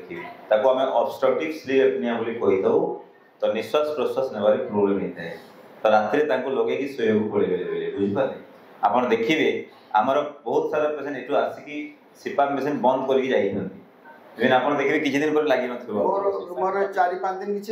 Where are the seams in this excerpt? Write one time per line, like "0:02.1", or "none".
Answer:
none